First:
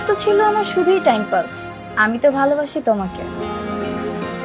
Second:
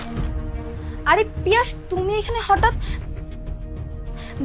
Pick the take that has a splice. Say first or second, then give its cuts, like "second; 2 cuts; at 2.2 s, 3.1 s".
first; 1 cut; at 3.3 s